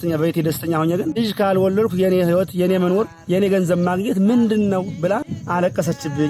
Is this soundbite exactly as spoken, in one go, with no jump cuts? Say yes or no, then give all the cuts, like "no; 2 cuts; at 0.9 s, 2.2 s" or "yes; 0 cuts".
no; 3 cuts; at 1.2 s, 3.2 s, 5.3 s